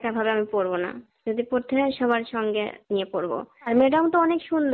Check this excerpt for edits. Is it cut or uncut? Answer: cut